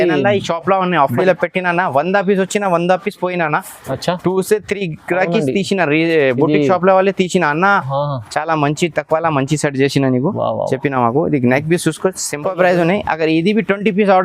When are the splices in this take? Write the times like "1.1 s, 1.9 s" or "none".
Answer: 1.2 s, 12.4 s

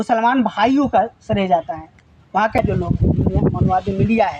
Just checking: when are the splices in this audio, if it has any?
2.6 s

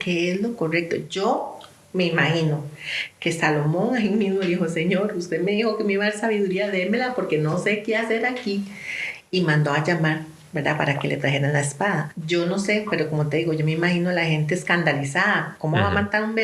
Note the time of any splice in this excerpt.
12.1 s

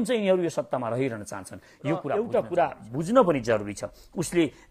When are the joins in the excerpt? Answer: 2.1 s

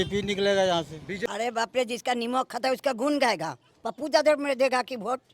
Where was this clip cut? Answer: 1.2 s

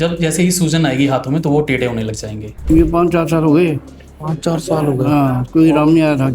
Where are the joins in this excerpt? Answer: 2.5 s

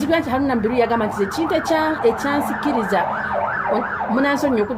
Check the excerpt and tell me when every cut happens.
none

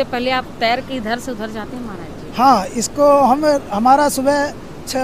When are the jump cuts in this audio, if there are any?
none

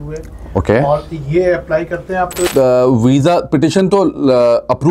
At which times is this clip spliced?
2.5 s

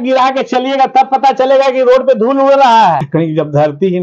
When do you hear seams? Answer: 3.0 s

